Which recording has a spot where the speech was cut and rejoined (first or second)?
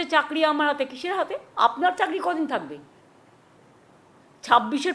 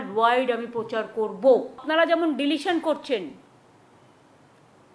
second